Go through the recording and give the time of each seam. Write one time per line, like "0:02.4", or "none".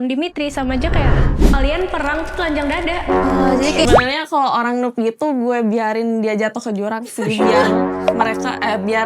0:03.9